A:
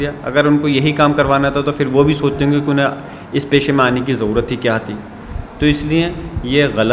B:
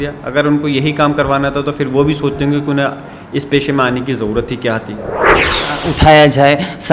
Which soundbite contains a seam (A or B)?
B